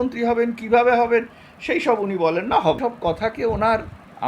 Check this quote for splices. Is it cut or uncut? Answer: cut